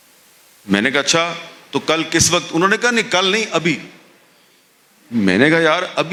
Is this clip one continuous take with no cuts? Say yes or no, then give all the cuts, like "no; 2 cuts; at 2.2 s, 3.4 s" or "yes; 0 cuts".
yes; 0 cuts